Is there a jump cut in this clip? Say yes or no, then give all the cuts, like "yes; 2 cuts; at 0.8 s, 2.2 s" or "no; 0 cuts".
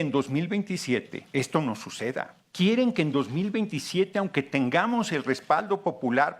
yes; 2 cuts; at 1.2 s, 2.4 s